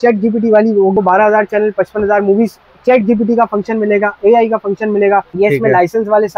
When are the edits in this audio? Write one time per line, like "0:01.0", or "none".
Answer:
0:00.9
0:05.3